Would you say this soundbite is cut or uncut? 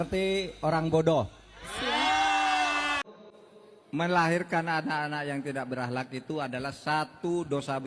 cut